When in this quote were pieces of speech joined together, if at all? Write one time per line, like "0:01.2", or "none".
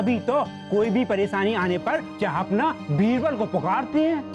0:02.1